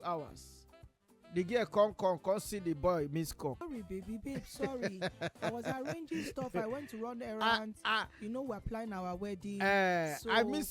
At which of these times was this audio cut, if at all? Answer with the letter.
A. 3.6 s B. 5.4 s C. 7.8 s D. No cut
A